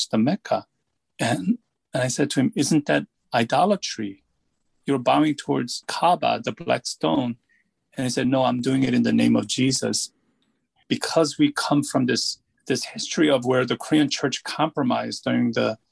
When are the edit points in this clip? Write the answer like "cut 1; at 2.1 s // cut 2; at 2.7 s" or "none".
cut 1; at 10.7 s // cut 2; at 12.5 s